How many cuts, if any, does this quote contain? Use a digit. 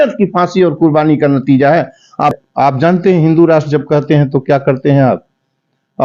1